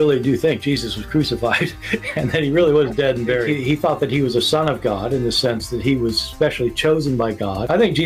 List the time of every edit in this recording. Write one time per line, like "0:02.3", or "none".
0:02.1

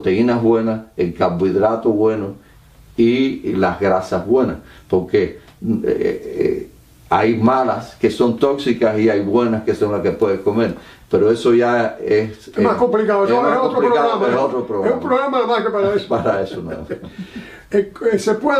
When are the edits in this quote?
none

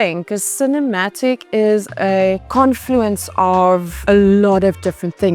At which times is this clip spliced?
0:02.4
0:03.9

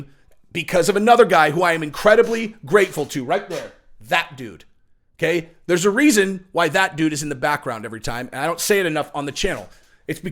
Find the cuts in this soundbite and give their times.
none

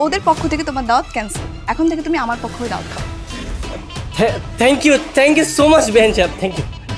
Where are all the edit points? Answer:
none

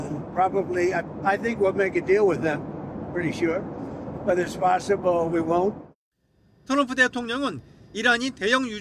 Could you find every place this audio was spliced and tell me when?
0:03.6

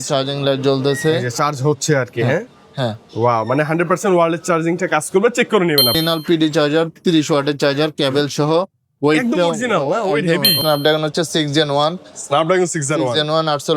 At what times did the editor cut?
0:06.0
0:10.5

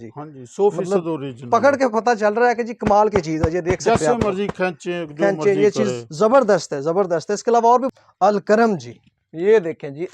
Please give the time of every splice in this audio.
0:07.9

